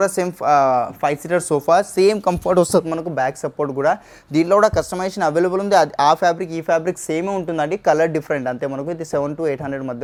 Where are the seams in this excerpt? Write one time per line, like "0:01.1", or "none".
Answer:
none